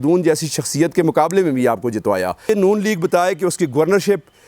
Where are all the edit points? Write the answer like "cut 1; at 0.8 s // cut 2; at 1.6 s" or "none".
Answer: cut 1; at 2.5 s